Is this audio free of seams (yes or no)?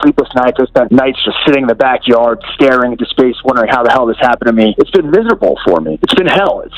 no